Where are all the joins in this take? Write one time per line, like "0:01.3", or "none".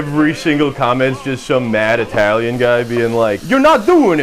none